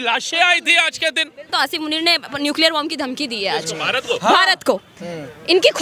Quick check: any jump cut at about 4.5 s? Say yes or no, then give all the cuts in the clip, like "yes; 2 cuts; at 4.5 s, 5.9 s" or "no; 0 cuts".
no; 1 cut; at 1.5 s